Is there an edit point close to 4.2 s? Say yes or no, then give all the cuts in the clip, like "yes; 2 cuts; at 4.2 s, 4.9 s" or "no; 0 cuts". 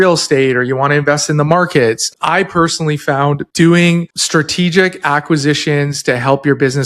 yes; 3 cuts; at 2.1 s, 3.5 s, 4.2 s